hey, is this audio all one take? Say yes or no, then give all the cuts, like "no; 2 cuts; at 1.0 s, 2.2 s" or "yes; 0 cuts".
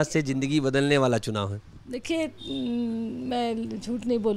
yes; 0 cuts